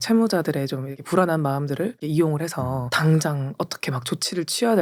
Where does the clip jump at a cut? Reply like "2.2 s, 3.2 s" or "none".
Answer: none